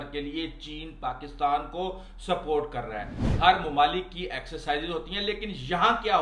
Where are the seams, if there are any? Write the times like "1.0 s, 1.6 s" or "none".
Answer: 3.2 s